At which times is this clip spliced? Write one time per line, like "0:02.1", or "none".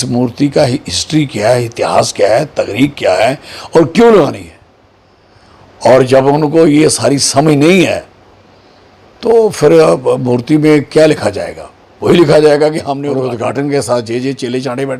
0:12.9